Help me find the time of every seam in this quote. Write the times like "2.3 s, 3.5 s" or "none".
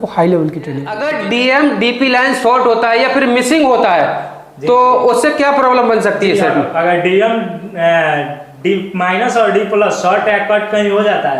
1.0 s